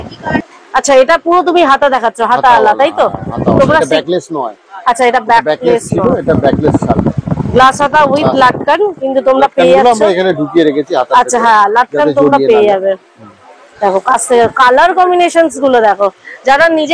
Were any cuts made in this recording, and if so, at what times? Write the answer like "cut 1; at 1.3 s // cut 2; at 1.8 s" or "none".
none